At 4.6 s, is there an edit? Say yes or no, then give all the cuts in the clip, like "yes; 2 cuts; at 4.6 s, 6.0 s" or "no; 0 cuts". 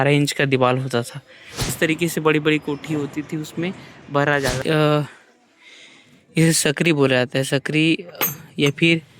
yes; 2 cuts; at 1.6 s, 4.6 s